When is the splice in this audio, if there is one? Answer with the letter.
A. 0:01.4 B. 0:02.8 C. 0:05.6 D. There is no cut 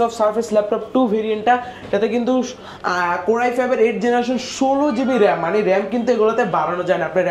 D